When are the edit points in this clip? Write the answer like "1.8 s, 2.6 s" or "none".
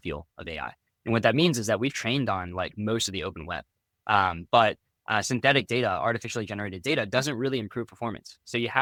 none